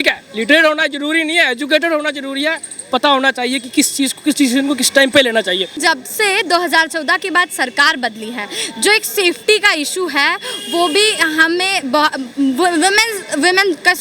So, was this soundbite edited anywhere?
yes; 1 cut; at 5.8 s

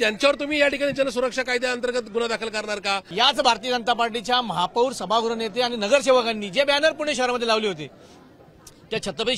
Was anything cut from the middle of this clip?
yes; 1 cut; at 3.1 s

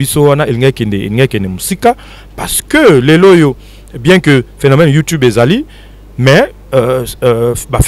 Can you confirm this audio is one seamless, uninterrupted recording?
yes; 0 cuts

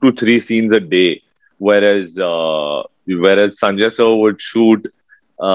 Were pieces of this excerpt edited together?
no; 0 cuts

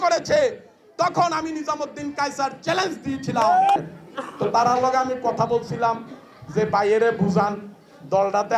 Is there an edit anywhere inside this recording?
yes; 1 cut; at 3.8 s

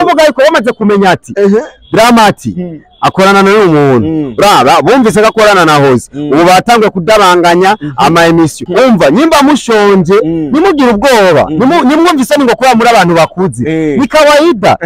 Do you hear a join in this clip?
yes; 1 cut; at 8.6 s

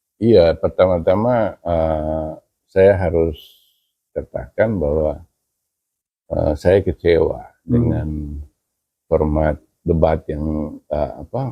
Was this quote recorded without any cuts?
yes; 0 cuts

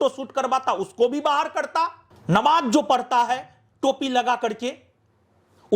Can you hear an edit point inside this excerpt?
yes; 1 cut; at 2.1 s

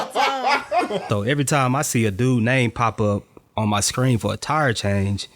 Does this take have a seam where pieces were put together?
yes; 1 cut; at 1.0 s

